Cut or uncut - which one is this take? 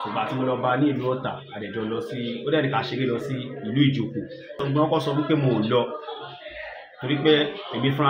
cut